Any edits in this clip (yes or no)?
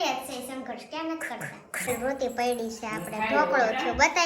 yes